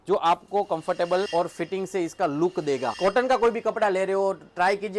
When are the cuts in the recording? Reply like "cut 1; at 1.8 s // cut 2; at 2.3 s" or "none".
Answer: cut 1; at 3.0 s